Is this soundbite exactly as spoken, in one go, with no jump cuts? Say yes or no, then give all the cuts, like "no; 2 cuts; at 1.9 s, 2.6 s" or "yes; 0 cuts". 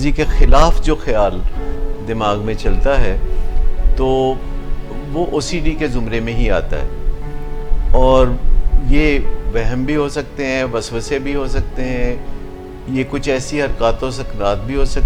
yes; 0 cuts